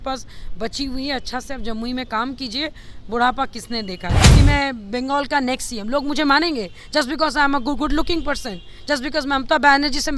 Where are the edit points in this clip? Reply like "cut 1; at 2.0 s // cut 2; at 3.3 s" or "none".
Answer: cut 1; at 4.2 s